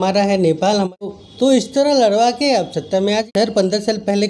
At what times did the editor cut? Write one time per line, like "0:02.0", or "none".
0:01.2
0:03.3